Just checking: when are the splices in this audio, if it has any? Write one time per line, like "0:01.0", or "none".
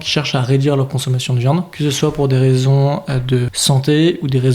0:01.7
0:03.5

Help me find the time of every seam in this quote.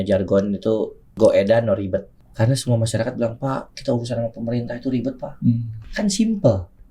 0:01.1
0:02.1
0:05.8

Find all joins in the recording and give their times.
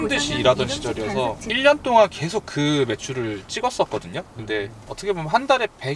none

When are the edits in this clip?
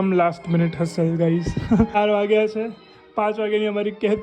0:02.0

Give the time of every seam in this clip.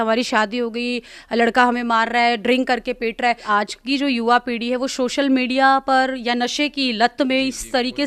0:03.4

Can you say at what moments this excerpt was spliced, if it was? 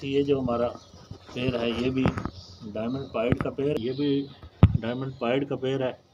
0:03.8

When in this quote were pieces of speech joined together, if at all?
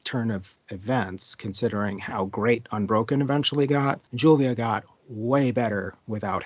0:04.1

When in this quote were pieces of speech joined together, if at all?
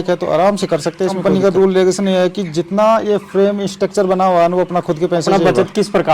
0:01.2
0:05.3

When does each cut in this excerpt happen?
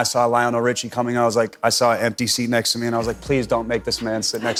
none

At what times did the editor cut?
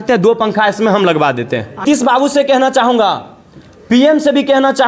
0:01.8

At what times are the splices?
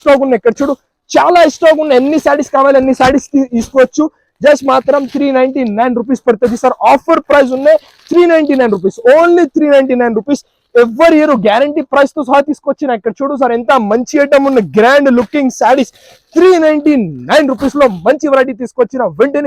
none

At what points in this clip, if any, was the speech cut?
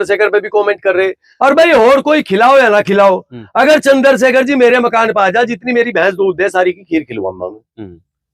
0:01.2

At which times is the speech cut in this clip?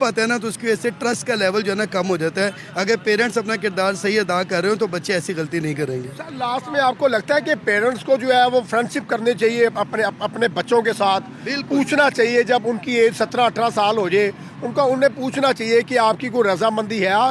none

